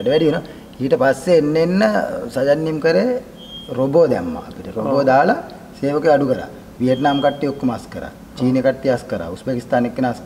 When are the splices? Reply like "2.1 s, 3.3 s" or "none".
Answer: none

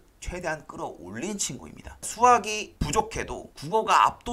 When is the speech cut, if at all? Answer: 1.9 s

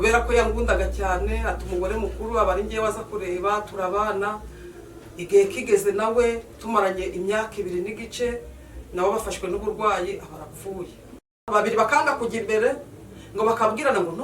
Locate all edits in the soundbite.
11.4 s

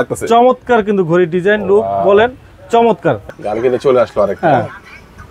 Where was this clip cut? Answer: 3.2 s

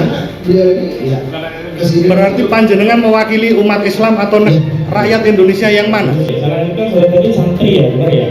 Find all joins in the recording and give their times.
6.3 s

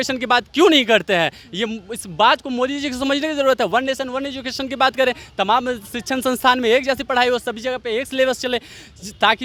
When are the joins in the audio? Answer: none

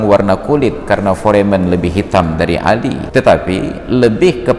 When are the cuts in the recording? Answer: 3.0 s

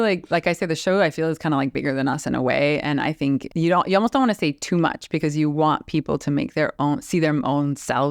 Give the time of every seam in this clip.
3.5 s

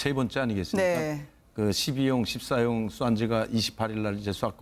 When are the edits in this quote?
2.2 s

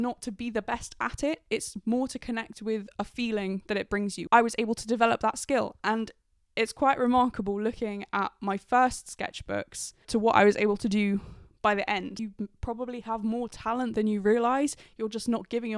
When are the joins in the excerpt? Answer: 4.2 s, 12.1 s

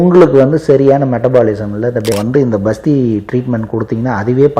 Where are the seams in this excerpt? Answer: 2.1 s

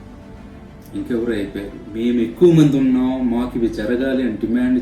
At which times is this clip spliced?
1.8 s

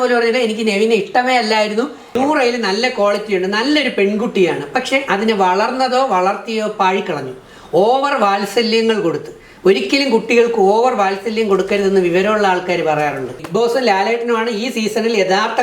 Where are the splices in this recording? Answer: 2.1 s, 13.4 s

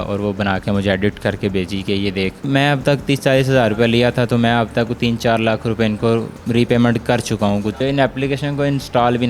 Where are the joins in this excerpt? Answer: 2.4 s, 6.4 s, 7.8 s

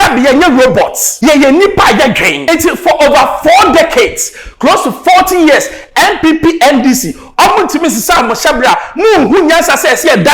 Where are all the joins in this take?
1.0 s, 2.3 s

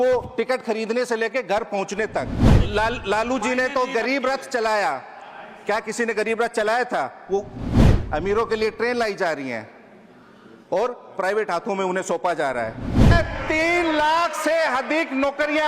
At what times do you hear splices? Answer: 2.6 s, 7.8 s, 13.1 s

